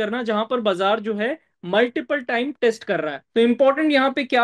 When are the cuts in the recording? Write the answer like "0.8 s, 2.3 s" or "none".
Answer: 3.2 s